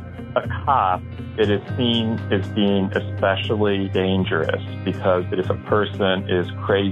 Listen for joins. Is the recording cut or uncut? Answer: cut